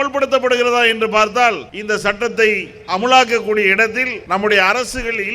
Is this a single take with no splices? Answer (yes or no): no